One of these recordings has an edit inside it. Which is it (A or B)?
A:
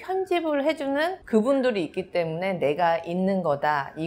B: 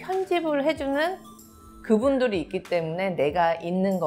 A